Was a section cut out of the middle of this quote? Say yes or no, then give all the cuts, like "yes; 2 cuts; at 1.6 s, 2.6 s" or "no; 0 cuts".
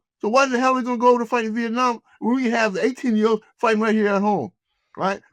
no; 0 cuts